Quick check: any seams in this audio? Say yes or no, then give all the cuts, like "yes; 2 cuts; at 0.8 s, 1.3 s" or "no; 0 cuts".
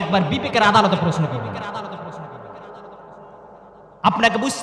no; 0 cuts